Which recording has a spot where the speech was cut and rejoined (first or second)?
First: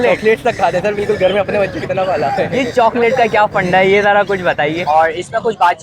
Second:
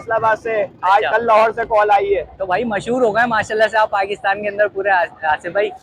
first